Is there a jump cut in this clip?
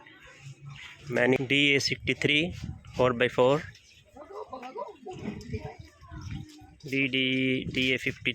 yes; 1 cut; at 1.4 s

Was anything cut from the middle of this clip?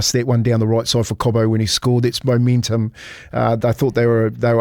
no; 0 cuts

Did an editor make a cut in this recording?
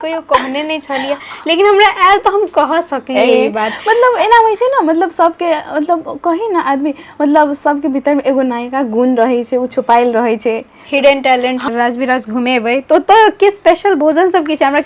yes; 1 cut; at 11.6 s

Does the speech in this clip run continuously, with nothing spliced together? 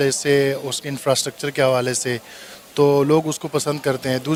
yes; 0 cuts

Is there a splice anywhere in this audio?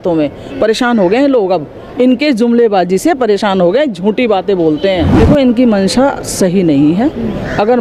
yes; 1 cut; at 5.1 s

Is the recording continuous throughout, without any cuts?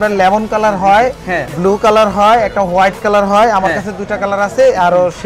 yes; 0 cuts

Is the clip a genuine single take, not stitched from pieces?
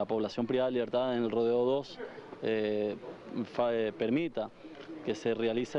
no; 1 cut; at 2.4 s

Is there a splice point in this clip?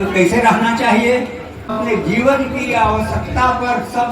yes; 1 cut; at 1.8 s

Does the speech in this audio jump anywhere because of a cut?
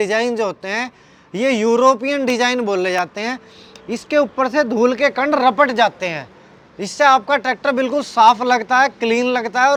no; 0 cuts

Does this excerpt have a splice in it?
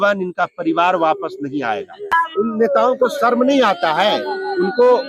yes; 1 cut; at 2.1 s

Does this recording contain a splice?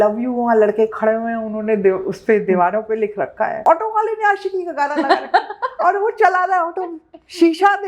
yes; 1 cut; at 3.6 s

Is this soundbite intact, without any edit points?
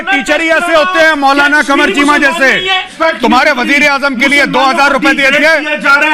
no; 1 cut; at 2.9 s

